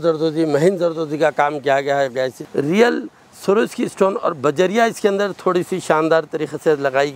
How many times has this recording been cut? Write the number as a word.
one